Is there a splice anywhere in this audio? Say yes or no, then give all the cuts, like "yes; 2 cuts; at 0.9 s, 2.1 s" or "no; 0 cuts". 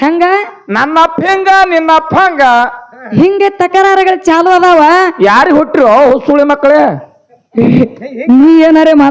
no; 0 cuts